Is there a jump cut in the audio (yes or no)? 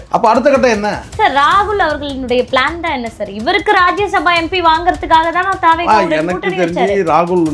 no